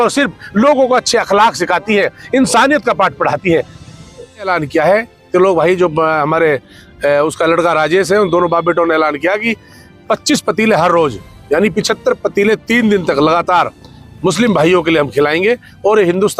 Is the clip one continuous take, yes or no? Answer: no